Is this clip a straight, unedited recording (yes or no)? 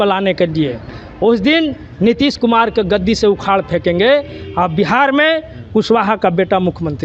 yes